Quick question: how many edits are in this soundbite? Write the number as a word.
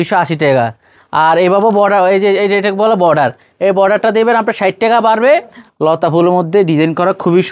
one